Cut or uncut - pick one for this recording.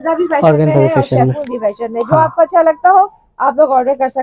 uncut